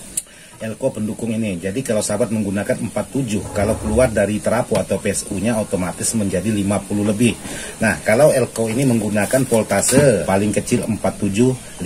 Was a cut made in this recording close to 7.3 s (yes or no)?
no